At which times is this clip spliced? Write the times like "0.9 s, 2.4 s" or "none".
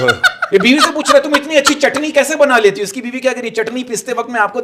none